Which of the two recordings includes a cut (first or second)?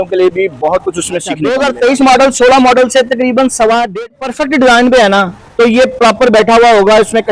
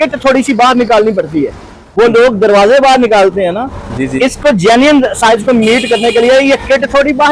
first